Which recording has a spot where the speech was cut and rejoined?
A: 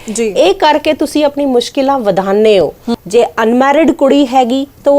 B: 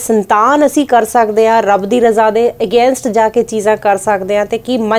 A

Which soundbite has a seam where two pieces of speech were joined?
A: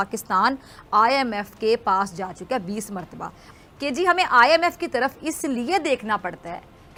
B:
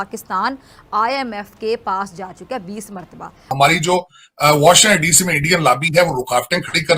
B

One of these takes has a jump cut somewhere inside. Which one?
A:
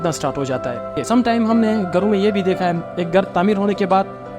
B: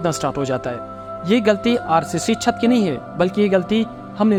A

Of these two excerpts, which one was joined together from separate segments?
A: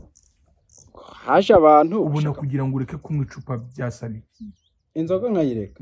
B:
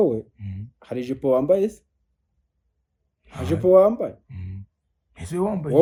A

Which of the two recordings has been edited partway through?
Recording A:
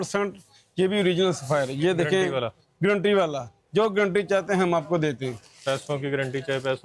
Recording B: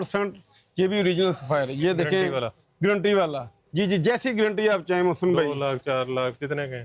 B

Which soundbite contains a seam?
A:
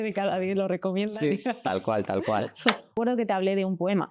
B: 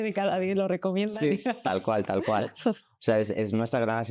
A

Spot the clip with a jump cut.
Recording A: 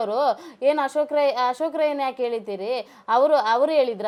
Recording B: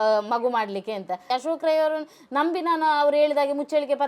B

